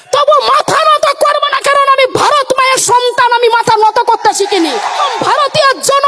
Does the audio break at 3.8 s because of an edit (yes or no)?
no